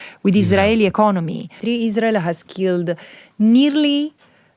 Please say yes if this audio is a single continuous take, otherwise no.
no